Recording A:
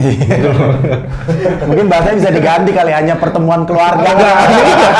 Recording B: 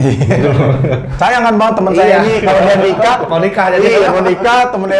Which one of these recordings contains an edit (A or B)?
B